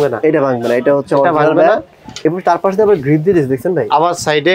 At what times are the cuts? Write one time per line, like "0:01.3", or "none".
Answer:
0:02.0